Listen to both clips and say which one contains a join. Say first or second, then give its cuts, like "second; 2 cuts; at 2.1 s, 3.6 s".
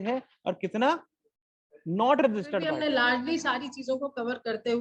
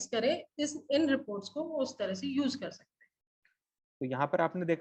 first; 1 cut; at 2.7 s